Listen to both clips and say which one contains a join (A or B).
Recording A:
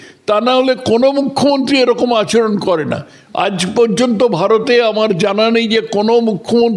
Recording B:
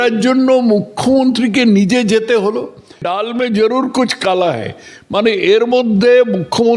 B